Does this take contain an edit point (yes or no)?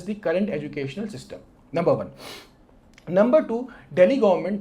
no